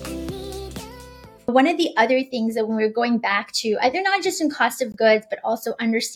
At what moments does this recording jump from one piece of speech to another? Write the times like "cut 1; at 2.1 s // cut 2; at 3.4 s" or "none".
cut 1; at 1.5 s